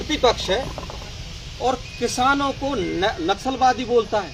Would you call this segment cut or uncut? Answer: uncut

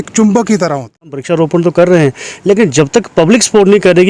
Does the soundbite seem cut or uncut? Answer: cut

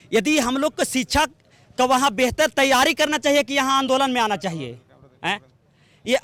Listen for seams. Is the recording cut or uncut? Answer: uncut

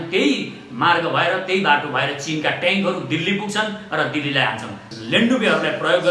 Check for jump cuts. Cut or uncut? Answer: cut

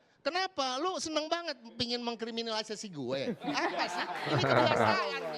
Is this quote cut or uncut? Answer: uncut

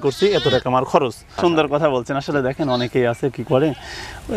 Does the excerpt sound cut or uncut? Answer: cut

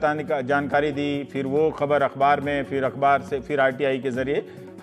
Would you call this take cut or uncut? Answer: cut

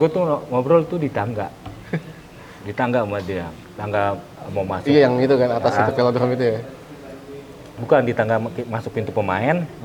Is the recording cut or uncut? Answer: uncut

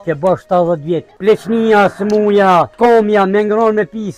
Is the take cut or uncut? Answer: cut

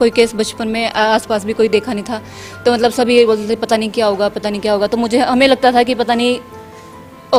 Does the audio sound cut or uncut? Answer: uncut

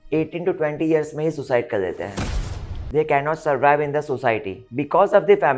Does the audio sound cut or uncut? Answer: cut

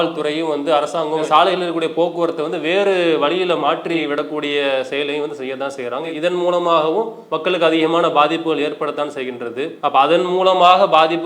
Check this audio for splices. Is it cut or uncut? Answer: cut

